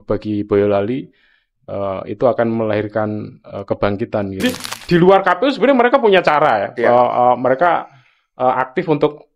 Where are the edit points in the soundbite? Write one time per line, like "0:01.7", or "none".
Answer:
0:04.4